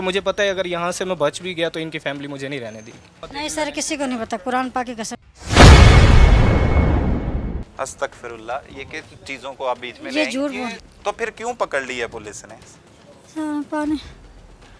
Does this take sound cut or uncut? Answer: cut